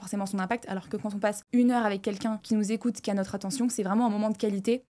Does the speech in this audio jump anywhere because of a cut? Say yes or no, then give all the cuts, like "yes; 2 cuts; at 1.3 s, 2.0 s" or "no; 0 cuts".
no; 0 cuts